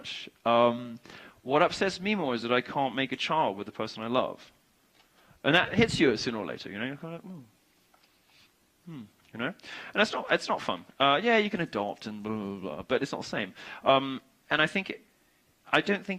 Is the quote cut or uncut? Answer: cut